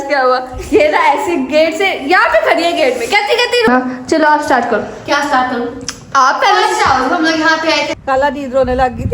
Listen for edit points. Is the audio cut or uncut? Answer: cut